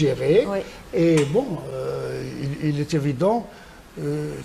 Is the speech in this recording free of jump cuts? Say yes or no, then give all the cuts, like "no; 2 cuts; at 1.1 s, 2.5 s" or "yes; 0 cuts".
yes; 0 cuts